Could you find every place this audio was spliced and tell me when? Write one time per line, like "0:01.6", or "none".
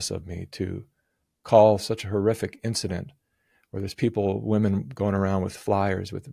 none